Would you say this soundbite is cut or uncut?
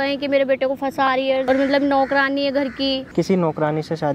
cut